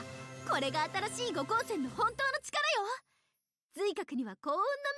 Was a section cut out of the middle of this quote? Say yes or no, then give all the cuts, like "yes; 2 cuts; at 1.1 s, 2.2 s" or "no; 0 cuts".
no; 0 cuts